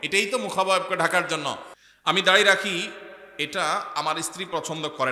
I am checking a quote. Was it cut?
yes; 1 cut; at 1.7 s

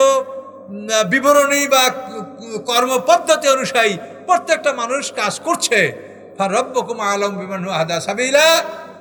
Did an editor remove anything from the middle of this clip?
no; 0 cuts

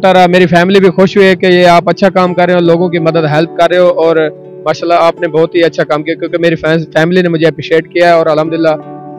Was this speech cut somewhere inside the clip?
no; 0 cuts

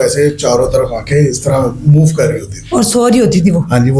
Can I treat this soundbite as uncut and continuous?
yes; 0 cuts

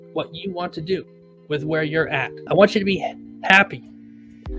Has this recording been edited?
yes; 1 cut; at 2.4 s

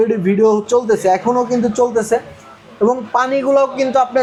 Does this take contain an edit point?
no; 0 cuts

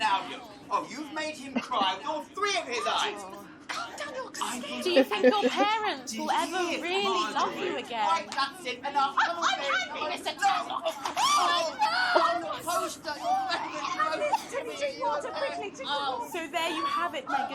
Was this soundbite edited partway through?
no; 0 cuts

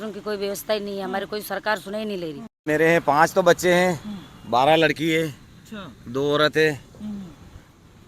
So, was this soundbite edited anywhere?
yes; 1 cut; at 2.6 s

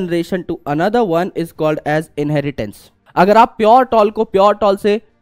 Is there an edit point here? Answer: yes; 1 cut; at 2.9 s

